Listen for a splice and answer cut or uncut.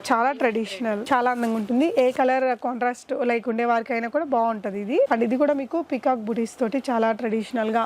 cut